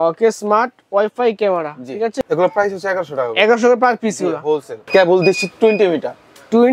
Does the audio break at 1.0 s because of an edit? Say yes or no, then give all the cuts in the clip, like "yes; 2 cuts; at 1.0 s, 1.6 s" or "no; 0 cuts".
no; 2 cuts; at 2.2 s, 4.8 s